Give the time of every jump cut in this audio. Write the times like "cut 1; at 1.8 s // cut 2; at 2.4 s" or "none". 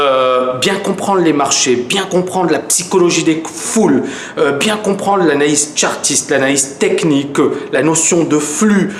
cut 1; at 7.1 s